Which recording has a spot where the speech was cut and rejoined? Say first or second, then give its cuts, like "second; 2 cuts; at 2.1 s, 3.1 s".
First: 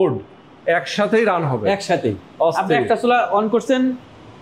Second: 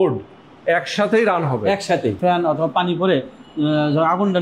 second; 1 cut; at 2.2 s